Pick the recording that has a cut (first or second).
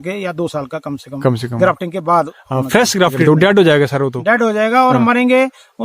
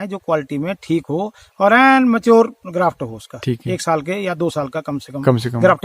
first